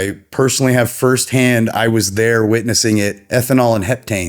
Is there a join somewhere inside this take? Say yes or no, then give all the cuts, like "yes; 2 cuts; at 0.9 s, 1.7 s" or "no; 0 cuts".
yes; 1 cut; at 3.2 s